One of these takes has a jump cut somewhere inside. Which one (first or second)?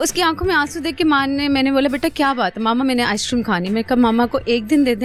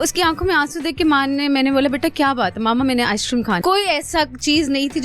second